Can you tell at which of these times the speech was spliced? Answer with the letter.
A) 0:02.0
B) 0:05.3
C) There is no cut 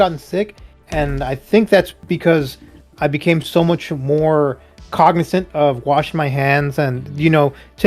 A